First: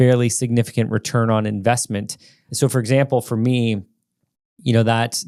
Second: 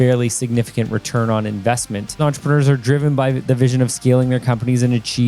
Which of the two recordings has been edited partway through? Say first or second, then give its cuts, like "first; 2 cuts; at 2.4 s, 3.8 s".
second; 1 cut; at 2.2 s